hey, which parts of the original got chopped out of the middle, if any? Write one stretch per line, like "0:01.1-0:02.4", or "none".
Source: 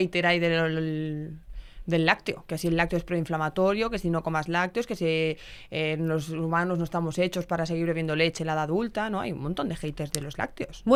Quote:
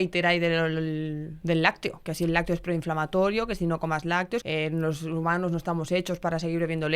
0:01.3-0:01.7
0:04.9-0:05.7